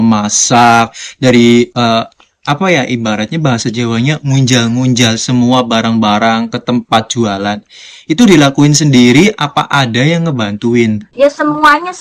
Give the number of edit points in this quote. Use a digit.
1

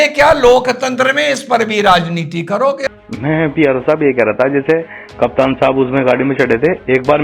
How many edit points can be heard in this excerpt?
1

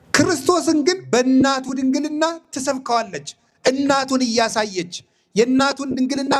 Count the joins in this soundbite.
1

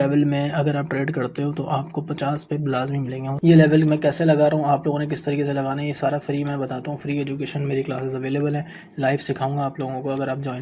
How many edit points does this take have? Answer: 1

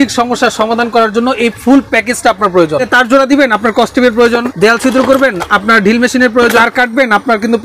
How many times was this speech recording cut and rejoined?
3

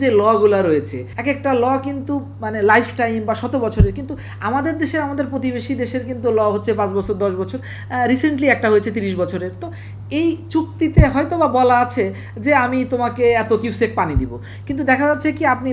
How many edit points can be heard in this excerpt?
1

